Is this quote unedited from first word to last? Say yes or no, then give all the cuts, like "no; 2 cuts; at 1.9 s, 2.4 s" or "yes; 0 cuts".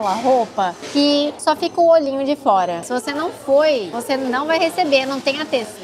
no; 3 cuts; at 1.1 s, 2.9 s, 3.9 s